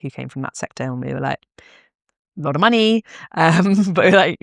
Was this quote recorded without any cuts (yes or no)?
yes